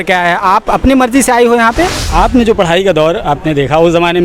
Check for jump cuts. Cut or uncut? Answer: cut